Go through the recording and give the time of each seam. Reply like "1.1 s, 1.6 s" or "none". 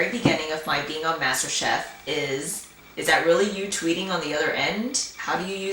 0.9 s